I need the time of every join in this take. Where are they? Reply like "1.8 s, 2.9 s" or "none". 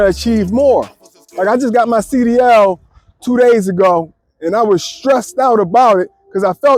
none